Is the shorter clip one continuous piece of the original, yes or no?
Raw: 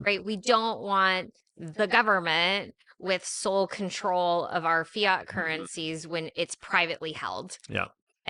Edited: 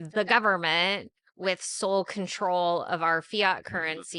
yes